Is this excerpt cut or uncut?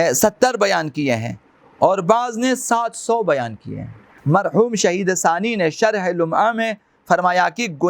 cut